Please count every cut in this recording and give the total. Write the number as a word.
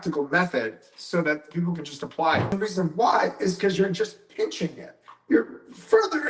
one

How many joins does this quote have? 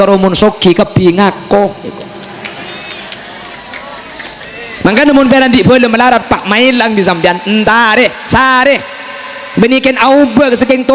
one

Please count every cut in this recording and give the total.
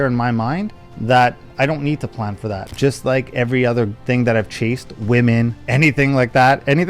one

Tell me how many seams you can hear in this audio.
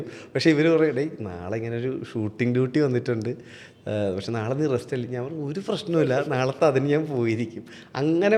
zero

